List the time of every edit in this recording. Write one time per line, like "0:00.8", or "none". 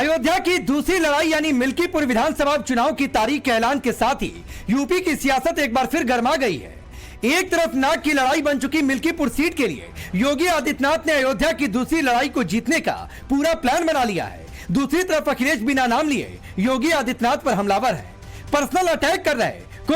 0:01.2